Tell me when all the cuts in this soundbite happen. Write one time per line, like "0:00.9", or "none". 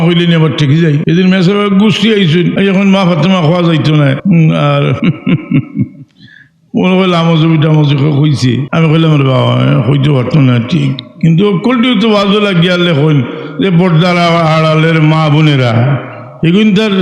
0:01.0
0:02.5
0:04.2
0:05.0
0:08.7